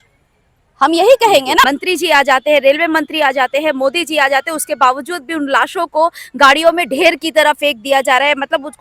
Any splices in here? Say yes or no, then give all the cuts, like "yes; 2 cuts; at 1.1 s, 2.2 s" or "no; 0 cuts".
yes; 1 cut; at 1.6 s